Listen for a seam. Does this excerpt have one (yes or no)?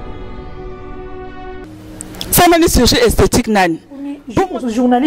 yes